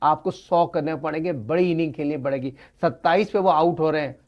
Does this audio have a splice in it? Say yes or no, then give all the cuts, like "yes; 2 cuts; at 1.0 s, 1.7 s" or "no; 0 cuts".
no; 0 cuts